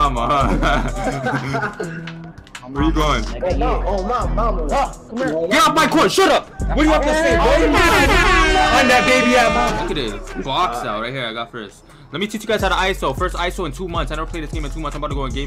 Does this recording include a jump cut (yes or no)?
yes